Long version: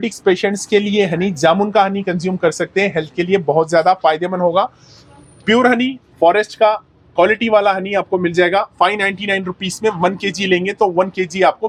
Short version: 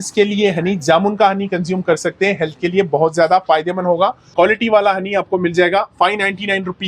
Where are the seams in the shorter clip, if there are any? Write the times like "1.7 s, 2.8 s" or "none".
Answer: 4.2 s